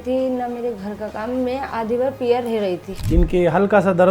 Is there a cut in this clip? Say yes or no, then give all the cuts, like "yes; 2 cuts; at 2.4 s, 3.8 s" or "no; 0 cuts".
yes; 1 cut; at 2.9 s